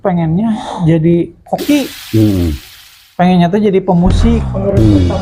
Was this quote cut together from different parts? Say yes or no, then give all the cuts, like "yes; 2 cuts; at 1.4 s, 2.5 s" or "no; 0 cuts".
no; 0 cuts